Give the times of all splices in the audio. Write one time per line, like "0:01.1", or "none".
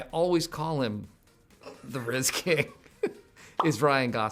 none